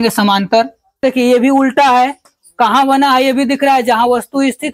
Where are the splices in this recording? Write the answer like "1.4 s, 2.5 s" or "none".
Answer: 1.0 s